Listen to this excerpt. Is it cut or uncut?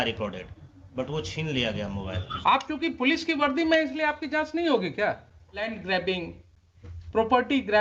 cut